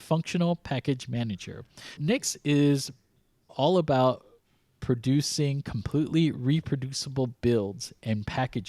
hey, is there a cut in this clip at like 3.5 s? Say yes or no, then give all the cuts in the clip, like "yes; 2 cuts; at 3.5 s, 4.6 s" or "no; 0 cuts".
yes; 2 cuts; at 2.0 s, 3.5 s